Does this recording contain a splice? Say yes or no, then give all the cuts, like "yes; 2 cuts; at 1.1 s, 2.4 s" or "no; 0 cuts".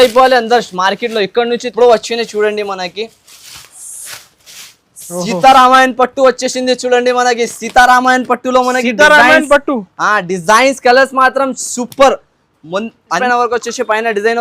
yes; 2 cuts; at 1.7 s, 13.2 s